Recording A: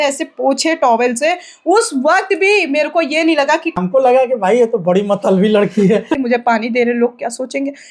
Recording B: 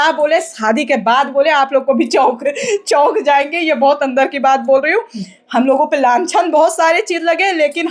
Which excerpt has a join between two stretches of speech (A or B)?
A